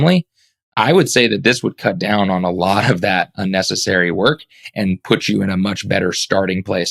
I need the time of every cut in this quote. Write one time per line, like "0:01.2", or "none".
none